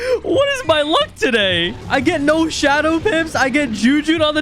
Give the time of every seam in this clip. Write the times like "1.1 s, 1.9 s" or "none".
1.8 s